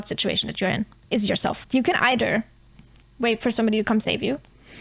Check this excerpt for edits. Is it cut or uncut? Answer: cut